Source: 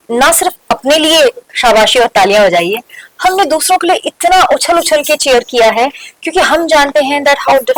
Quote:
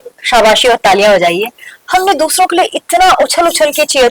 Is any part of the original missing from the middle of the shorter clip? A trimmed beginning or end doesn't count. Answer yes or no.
no